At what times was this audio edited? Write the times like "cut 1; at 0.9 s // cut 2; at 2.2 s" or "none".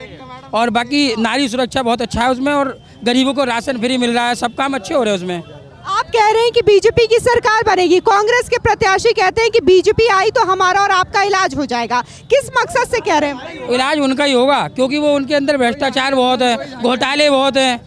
none